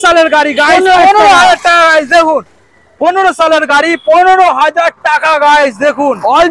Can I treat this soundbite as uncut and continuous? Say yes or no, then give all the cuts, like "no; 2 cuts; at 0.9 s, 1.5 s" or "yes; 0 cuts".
yes; 0 cuts